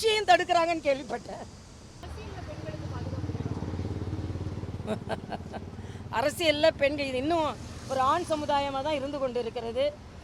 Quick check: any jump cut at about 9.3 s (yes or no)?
no